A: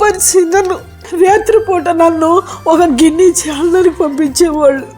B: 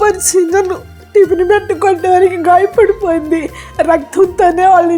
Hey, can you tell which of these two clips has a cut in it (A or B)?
A